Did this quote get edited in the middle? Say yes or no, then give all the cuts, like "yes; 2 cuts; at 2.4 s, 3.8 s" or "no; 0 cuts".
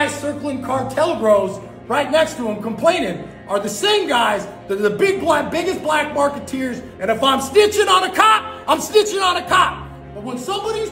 yes; 1 cut; at 6.9 s